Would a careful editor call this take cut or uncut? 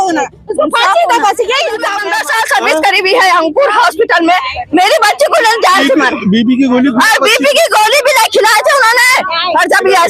cut